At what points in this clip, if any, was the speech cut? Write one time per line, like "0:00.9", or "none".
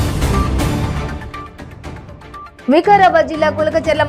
none